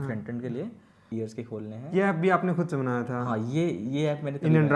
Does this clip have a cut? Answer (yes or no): yes